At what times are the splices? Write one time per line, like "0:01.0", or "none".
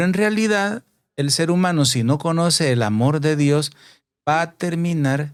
none